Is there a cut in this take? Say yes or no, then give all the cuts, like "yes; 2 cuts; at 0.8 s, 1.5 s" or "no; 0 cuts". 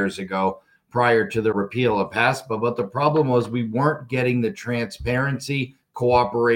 yes; 1 cut; at 1.5 s